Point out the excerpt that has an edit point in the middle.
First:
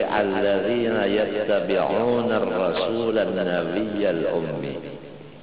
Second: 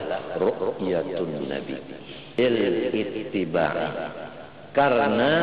second; 1 cut; at 2.4 s

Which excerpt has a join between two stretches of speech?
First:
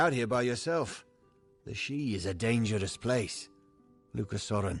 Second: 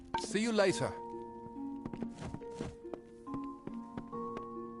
second; 1 cut; at 0.9 s

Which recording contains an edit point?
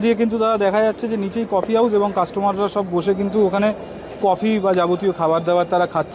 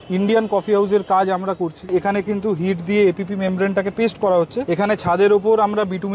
second; 2 cuts; at 1.9 s, 4.6 s

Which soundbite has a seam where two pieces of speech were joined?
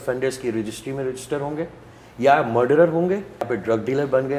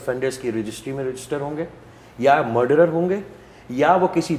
first; 1 cut; at 3.5 s

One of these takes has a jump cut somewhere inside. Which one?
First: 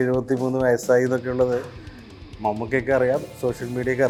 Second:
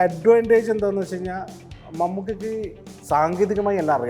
second; 1 cut; at 2.9 s

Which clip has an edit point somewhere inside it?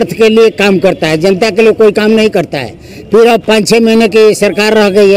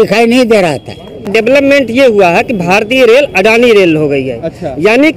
second; 1 cut; at 1.3 s

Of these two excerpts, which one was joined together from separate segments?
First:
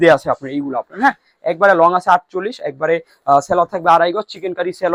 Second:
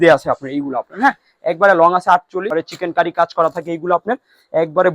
second; 1 cut; at 2.5 s

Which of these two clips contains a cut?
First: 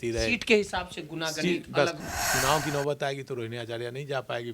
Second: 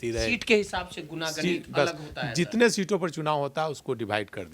first; 1 cut; at 2.1 s

